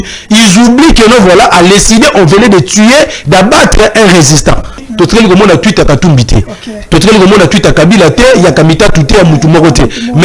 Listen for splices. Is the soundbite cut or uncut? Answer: cut